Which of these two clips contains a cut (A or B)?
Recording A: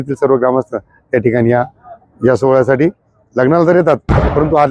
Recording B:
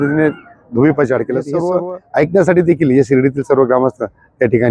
B